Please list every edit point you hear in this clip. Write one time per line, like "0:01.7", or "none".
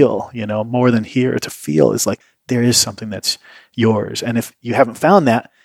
0:02.3